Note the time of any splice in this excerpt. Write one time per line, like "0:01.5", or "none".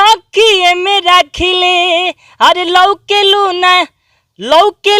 none